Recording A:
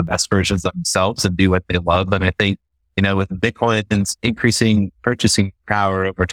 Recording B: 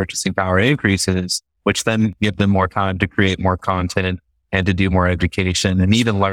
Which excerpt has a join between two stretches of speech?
A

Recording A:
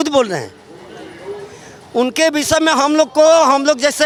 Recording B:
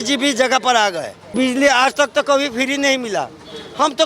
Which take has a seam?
B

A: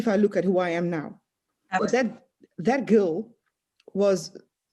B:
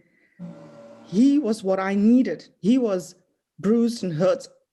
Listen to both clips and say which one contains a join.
A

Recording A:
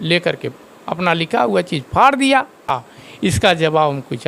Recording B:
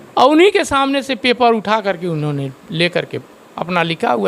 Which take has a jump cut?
A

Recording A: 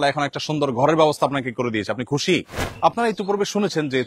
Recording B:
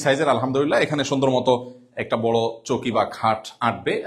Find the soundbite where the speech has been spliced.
A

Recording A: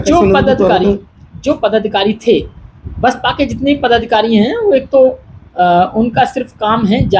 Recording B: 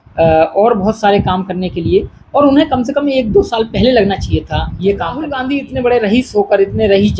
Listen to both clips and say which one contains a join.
B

